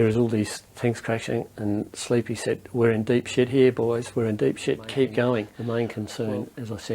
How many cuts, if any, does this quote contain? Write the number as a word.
one